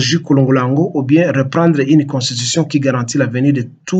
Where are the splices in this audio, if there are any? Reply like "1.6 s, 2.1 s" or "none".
none